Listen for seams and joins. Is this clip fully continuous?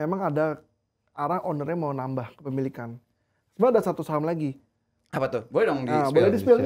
yes; 0 cuts

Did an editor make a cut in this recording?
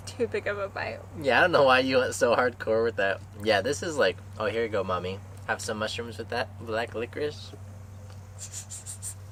no; 0 cuts

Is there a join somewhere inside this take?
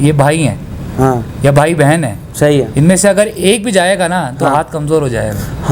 no; 0 cuts

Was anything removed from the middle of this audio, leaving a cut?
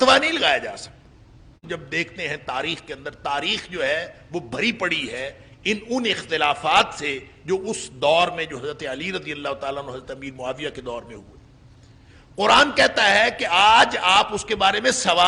yes; 1 cut; at 1.7 s

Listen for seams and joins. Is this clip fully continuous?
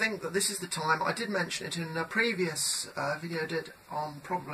yes; 0 cuts

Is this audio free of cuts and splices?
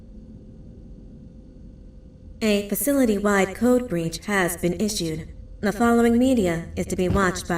no; 1 cut; at 2.4 s

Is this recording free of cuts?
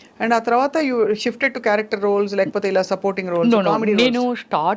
yes; 0 cuts

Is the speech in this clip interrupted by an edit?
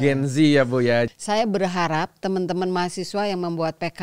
yes; 1 cut; at 1.1 s

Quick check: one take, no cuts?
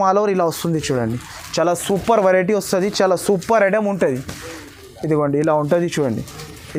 yes; 0 cuts

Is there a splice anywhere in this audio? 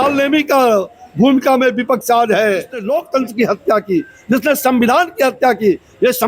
yes; 1 cut; at 2.8 s

